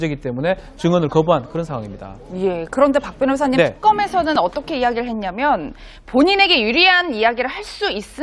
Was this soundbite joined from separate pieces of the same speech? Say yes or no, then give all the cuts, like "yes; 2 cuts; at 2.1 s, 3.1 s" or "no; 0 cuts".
no; 0 cuts